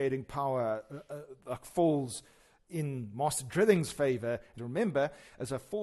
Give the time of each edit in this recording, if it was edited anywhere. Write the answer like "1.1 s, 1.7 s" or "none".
4.5 s